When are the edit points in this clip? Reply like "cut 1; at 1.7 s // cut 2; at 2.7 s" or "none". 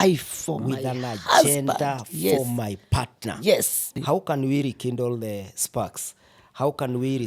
cut 1; at 4.0 s